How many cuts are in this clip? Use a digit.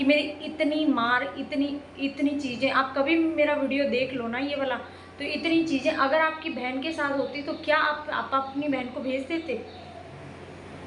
0